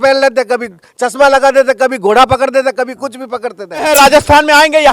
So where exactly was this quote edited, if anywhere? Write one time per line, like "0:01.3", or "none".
0:03.9